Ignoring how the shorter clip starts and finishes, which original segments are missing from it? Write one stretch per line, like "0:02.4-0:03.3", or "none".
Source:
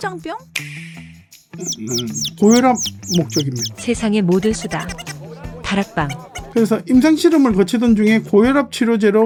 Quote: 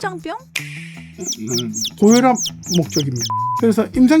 0:01.0-0:01.4
0:03.7-0:06.2